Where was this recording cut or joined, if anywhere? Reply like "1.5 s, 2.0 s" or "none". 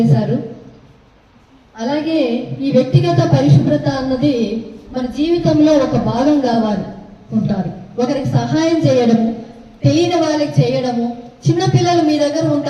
7.3 s